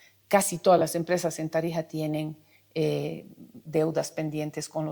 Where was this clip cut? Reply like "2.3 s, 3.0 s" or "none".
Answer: none